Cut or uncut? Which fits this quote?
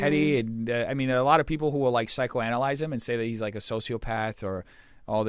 uncut